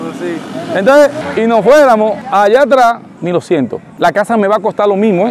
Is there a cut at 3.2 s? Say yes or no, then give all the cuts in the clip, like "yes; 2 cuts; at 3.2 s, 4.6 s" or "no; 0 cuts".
yes; 2 cuts; at 1.2 s, 3.2 s